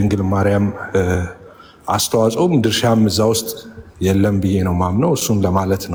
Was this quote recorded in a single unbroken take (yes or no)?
yes